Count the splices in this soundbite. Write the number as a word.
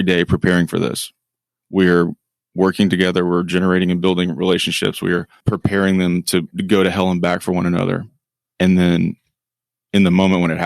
one